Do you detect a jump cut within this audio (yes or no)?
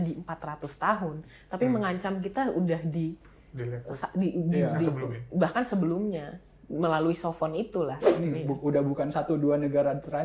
yes